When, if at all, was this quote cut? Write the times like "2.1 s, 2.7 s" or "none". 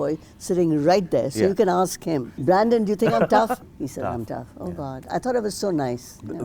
2.3 s, 3.6 s